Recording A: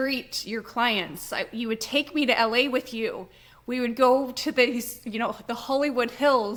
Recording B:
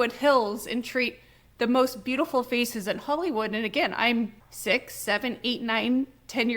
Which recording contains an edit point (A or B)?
B